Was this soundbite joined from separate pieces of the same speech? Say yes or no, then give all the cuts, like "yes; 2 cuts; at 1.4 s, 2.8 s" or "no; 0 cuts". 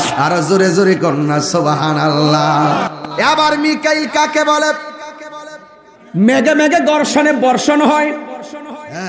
yes; 1 cut; at 3.0 s